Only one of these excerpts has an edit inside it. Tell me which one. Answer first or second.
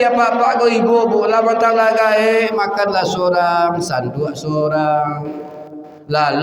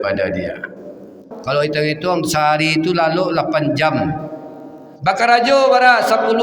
second